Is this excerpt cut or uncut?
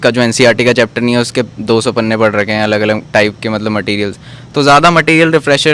uncut